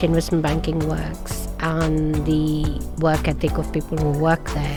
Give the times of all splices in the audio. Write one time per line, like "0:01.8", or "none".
none

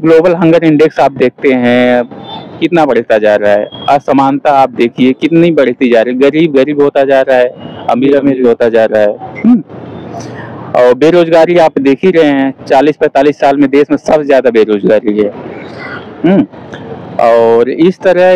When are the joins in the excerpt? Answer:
none

